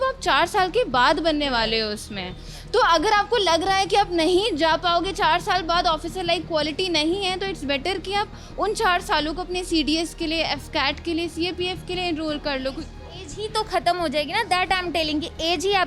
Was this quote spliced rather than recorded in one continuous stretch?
no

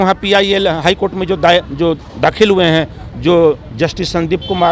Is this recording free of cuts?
yes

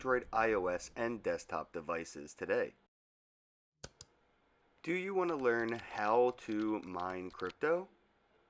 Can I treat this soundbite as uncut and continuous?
yes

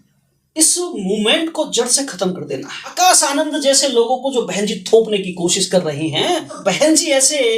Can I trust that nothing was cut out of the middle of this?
no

